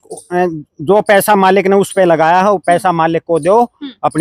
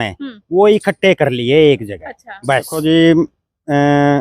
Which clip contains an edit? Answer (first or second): second